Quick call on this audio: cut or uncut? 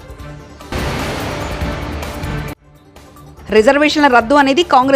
uncut